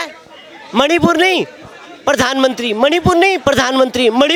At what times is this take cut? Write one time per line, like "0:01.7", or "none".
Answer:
none